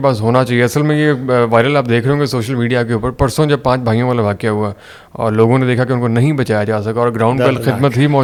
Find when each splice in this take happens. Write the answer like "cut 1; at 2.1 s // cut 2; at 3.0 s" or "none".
none